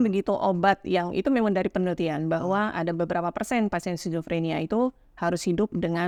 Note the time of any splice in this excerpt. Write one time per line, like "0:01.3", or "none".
none